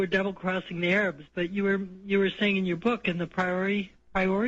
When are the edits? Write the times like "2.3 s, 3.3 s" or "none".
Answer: 2.0 s